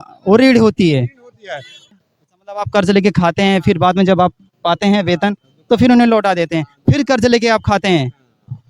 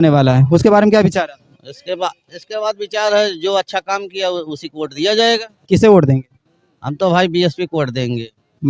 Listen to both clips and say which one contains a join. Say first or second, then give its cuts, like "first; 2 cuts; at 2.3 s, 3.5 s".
first; 1 cut; at 1.9 s